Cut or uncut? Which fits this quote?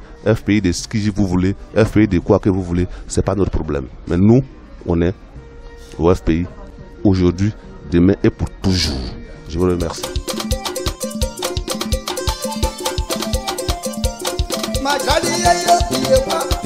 cut